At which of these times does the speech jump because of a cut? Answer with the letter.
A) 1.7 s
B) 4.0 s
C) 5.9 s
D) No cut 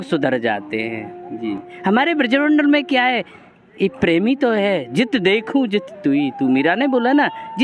A